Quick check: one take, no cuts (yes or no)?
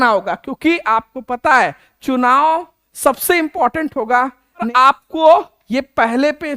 no